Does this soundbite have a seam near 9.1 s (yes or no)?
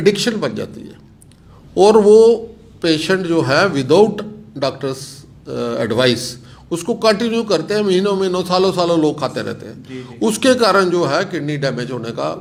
no